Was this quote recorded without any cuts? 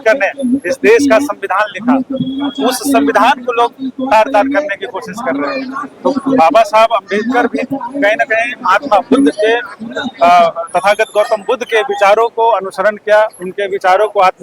yes; 0 cuts

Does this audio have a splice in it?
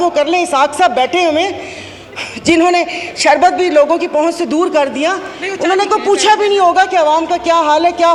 no; 0 cuts

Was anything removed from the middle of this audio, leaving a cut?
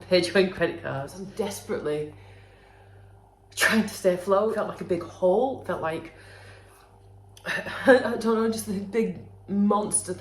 yes; 2 cuts; at 1.2 s, 4.6 s

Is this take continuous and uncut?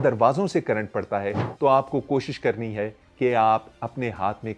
yes; 0 cuts

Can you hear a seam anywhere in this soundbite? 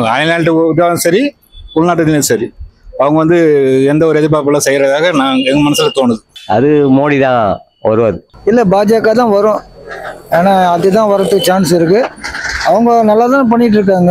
yes; 1 cut; at 8.3 s

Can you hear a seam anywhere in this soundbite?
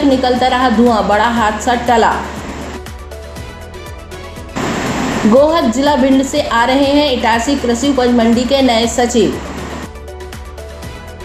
no; 0 cuts

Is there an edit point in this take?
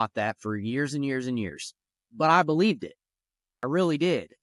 yes; 1 cut; at 2.1 s

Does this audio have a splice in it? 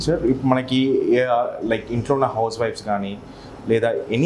no; 0 cuts

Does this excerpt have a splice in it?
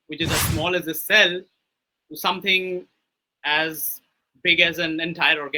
no; 0 cuts

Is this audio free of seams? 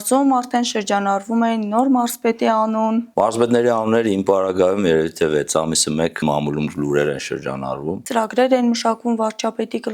no; 3 cuts; at 3.1 s, 6.2 s, 7.9 s

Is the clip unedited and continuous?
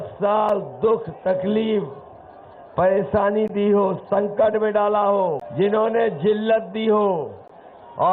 no; 1 cut; at 5.4 s

